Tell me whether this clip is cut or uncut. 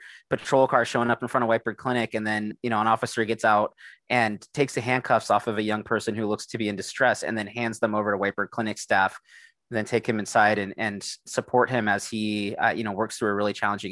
uncut